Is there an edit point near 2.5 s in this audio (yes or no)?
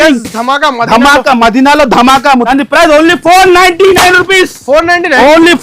yes